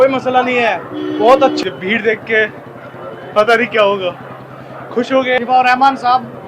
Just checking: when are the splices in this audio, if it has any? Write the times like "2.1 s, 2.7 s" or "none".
1.6 s, 5.4 s